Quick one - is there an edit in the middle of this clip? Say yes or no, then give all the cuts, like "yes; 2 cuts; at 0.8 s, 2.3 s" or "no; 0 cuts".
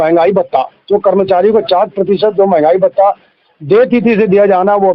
no; 0 cuts